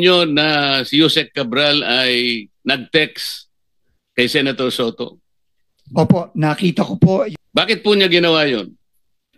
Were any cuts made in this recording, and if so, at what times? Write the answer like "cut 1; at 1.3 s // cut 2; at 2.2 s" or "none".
cut 1; at 7.3 s